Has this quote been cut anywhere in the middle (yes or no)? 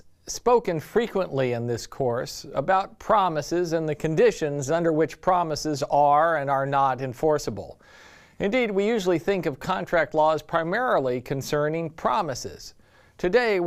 no